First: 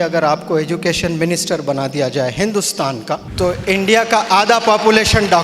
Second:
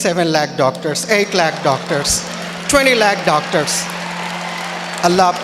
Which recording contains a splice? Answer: first; 1 cut; at 3.3 s

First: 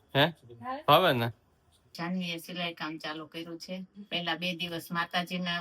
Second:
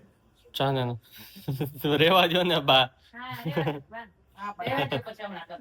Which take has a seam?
first; 2 cuts; at 1.8 s, 4.0 s

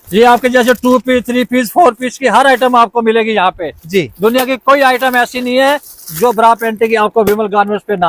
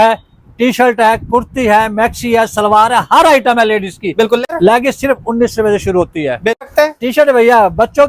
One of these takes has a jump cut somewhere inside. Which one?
second; 2 cuts; at 4.5 s, 6.6 s

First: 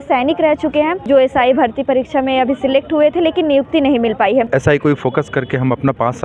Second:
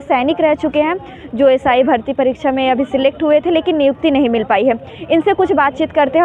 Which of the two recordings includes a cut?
first; 2 cuts; at 1.0 s, 4.5 s

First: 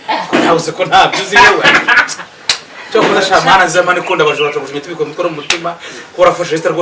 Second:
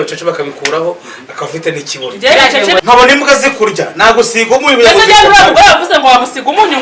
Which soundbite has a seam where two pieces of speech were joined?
second; 1 cut; at 2.8 s

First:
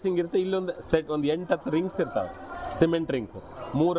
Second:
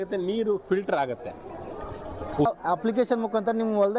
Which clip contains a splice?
second; 1 cut; at 2.5 s

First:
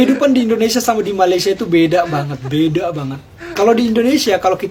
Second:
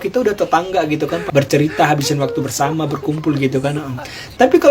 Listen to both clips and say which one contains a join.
second; 1 cut; at 1.2 s

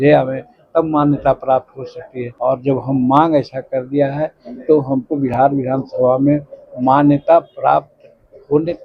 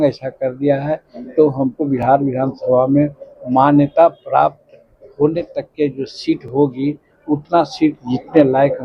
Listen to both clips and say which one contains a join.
first; 1 cut; at 2.2 s

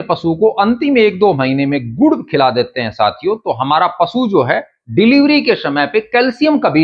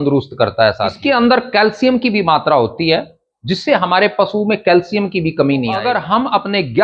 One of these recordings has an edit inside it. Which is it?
second; 2 cuts; at 0.9 s, 5.8 s

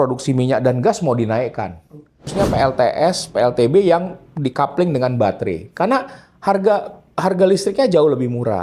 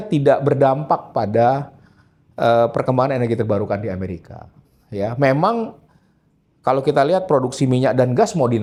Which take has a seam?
first; 1 cut; at 2.3 s

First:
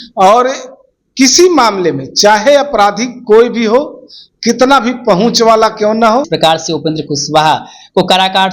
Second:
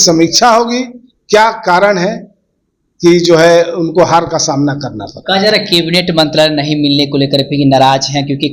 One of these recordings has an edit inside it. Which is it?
first; 1 cut; at 6.3 s

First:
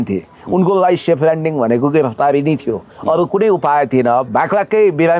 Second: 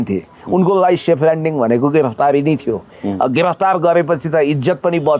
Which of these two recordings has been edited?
second; 1 cut; at 2.9 s

